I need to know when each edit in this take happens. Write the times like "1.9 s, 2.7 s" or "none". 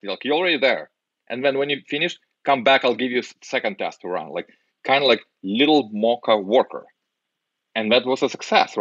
none